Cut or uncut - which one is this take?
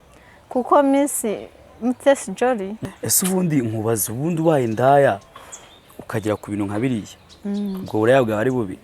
cut